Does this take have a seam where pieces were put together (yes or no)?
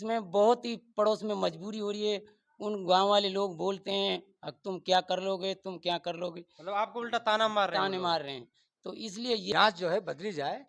yes